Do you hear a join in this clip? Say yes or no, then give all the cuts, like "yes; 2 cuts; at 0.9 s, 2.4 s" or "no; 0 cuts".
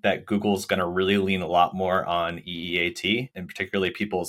no; 0 cuts